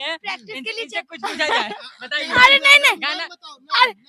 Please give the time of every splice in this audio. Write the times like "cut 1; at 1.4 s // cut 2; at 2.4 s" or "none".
none